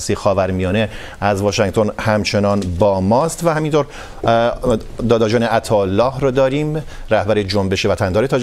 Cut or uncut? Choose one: uncut